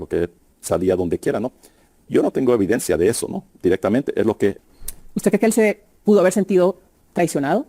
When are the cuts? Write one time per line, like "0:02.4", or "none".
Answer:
0:04.6